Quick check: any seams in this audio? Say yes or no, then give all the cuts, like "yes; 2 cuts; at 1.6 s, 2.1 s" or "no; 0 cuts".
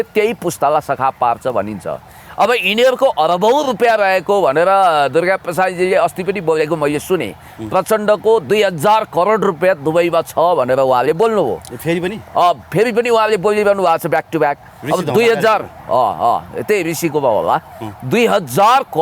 no; 0 cuts